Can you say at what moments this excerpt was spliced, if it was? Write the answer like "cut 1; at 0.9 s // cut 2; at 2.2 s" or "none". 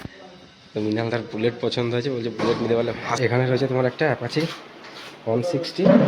cut 1; at 3.1 s